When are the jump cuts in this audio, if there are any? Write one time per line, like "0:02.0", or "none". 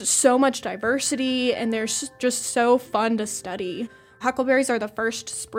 0:02.2
0:04.0